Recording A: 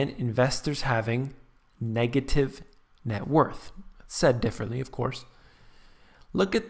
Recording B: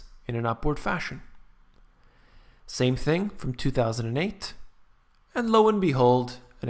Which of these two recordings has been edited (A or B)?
A